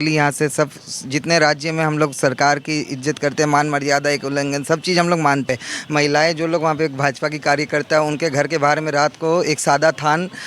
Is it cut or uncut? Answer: cut